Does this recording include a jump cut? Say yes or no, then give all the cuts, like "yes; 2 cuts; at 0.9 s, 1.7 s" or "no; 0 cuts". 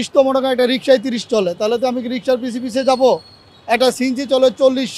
no; 0 cuts